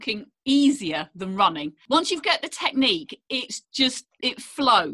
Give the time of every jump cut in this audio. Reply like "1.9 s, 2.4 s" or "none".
1.7 s

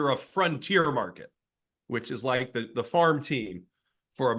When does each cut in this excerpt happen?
none

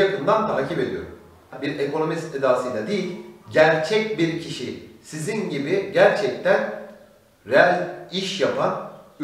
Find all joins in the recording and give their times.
1.6 s

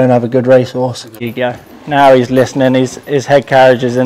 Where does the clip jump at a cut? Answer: 1.3 s

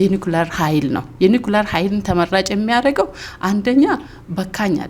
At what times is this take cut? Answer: none

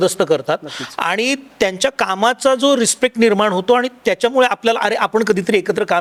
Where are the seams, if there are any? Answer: none

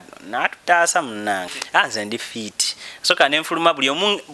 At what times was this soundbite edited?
1.5 s

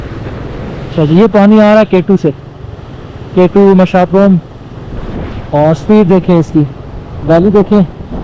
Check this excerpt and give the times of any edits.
none

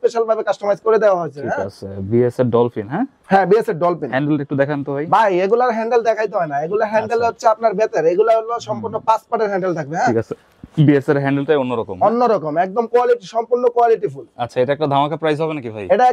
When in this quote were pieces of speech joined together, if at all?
none

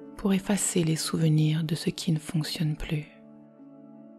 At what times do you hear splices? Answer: 3.1 s

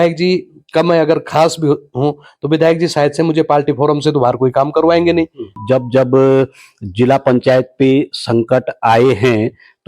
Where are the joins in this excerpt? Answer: 5.6 s

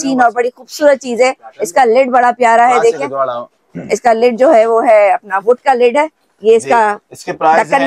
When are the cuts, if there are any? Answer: none

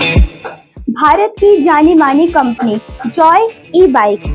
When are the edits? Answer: none

